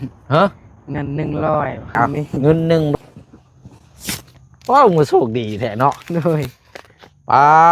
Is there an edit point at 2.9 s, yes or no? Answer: yes